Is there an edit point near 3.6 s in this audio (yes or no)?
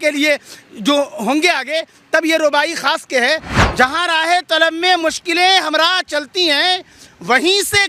yes